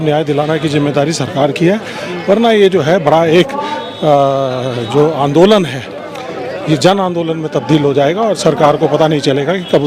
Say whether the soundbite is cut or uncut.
uncut